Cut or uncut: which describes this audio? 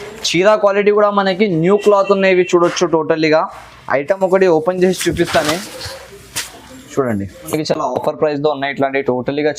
cut